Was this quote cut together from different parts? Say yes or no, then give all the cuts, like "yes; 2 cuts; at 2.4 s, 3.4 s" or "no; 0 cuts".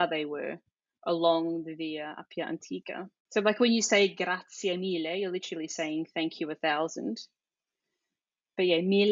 yes; 1 cut; at 3.2 s